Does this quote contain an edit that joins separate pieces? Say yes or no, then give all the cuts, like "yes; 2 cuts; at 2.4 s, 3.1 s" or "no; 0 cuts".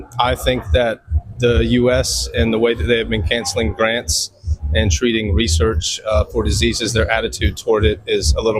no; 0 cuts